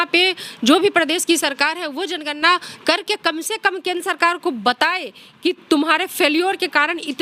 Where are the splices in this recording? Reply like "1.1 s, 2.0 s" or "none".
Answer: none